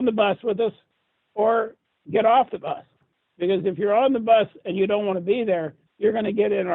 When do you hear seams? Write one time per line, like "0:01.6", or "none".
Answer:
none